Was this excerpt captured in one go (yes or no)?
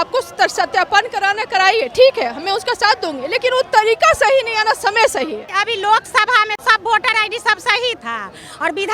no